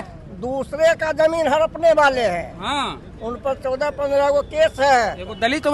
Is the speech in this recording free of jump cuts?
yes; 0 cuts

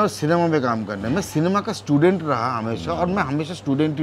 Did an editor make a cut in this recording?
no; 0 cuts

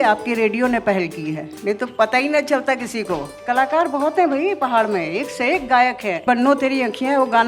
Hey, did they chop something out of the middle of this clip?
yes; 2 cuts; at 3.4 s, 6.2 s

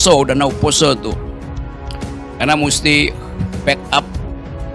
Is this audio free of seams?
yes; 0 cuts

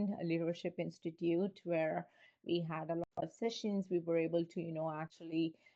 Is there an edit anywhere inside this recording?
no; 0 cuts

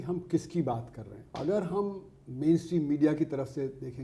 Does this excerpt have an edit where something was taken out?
yes; 1 cut; at 1.2 s

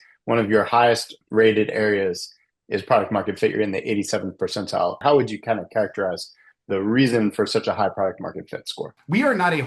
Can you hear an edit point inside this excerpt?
no; 0 cuts

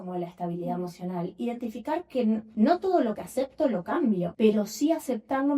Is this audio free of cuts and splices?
no; 2 cuts; at 2.5 s, 4.3 s

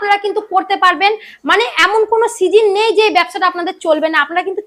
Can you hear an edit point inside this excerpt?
no; 0 cuts

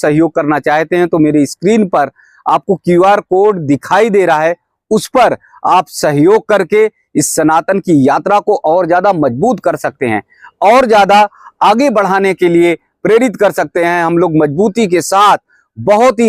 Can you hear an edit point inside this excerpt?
no; 0 cuts

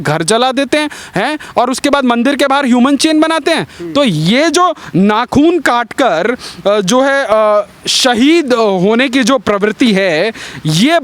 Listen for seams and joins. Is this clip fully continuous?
yes; 0 cuts

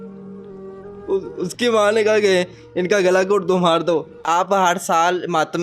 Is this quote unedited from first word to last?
no; 2 cuts; at 1.1 s, 4.1 s

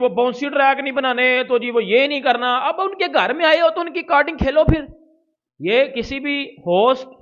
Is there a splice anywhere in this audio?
no; 0 cuts

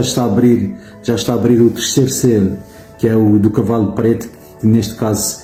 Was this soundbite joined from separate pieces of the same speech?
no; 0 cuts

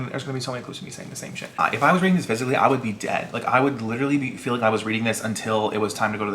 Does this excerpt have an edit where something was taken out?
yes; 1 cut; at 1.6 s

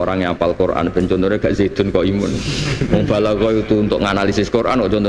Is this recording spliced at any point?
no; 0 cuts

